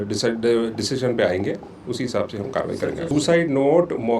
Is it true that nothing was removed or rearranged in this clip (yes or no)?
no